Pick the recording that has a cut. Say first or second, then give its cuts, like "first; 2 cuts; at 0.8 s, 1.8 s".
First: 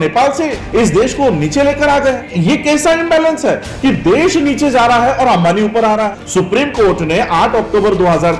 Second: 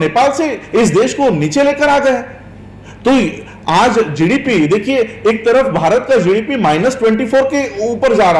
first; 2 cuts; at 2.3 s, 6.2 s